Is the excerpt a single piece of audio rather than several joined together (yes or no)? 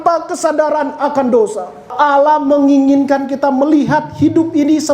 no